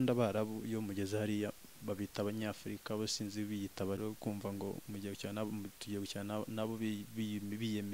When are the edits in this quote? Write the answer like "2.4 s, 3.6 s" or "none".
4.0 s